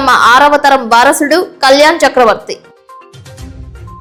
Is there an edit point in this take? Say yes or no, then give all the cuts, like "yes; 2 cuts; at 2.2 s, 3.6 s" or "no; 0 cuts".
no; 0 cuts